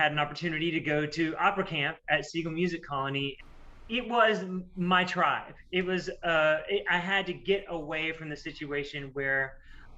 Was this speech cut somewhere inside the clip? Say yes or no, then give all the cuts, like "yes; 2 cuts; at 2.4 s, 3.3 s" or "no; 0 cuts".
yes; 1 cut; at 3.4 s